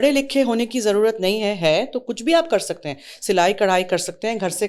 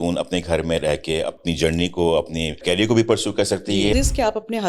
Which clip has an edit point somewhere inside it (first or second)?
second